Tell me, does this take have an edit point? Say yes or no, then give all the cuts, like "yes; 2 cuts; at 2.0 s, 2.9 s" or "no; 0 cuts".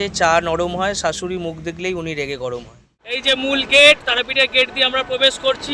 yes; 1 cut; at 3.2 s